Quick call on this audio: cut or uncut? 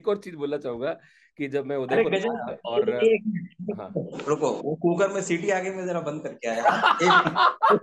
uncut